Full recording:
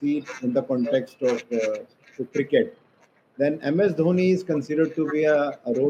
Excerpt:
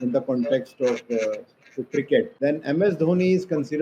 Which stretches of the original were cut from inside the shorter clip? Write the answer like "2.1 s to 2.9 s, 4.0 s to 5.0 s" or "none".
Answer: 2.7 s to 3.3 s